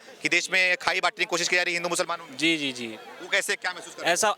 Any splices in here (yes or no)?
no